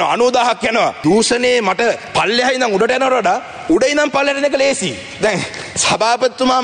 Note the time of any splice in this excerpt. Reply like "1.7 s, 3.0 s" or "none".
1.0 s, 2.0 s